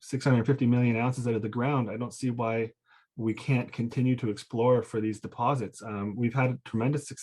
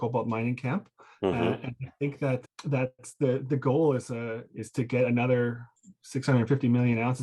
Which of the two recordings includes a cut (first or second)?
second